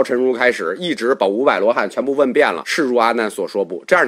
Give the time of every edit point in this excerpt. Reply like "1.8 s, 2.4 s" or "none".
2.6 s